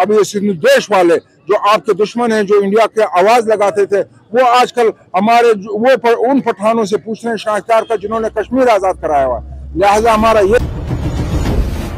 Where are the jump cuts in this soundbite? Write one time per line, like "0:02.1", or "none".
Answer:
0:10.6

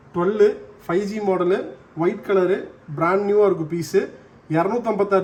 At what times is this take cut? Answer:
none

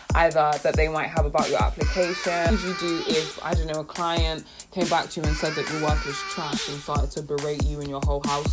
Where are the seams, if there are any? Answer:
0:02.5

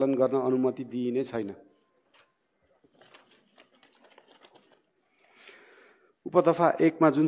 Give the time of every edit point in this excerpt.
none

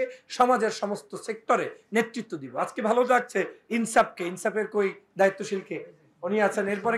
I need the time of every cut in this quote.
none

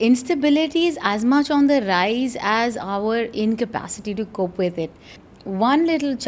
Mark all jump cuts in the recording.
0:05.2

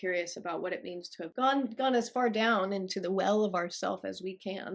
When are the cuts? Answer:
0:01.3

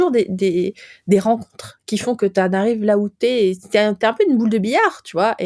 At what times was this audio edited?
none

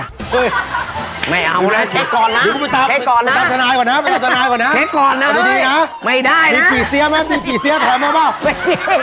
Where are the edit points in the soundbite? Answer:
none

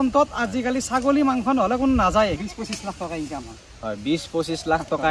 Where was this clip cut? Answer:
0:02.4

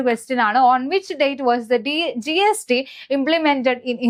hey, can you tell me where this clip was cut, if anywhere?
none

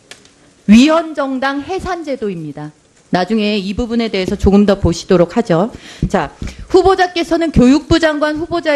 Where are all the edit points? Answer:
none

